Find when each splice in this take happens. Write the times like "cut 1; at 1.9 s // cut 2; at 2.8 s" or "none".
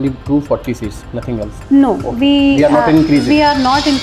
none

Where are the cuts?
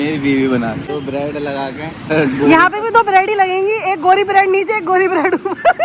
cut 1; at 1.0 s // cut 2; at 2.1 s

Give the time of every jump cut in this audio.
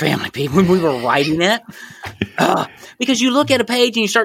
none

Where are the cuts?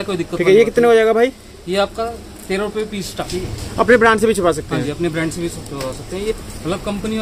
cut 1; at 3.2 s // cut 2; at 6.3 s

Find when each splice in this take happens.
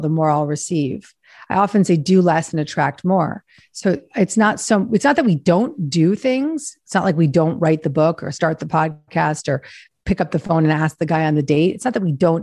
none

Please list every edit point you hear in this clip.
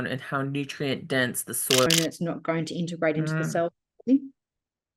cut 1; at 1.9 s

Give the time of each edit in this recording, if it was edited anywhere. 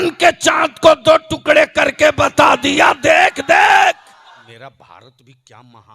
cut 1; at 4.4 s

